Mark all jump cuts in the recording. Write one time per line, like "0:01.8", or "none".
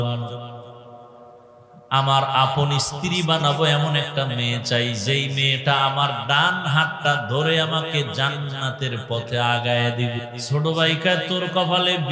0:10.3